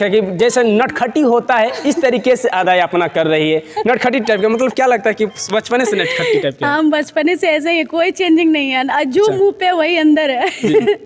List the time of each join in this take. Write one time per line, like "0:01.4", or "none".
none